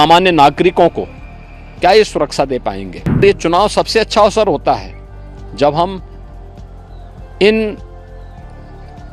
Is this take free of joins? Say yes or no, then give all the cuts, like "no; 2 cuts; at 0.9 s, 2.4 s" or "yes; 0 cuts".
no; 1 cut; at 3.2 s